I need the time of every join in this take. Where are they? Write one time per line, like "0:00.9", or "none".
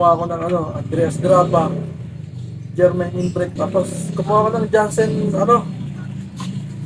0:03.5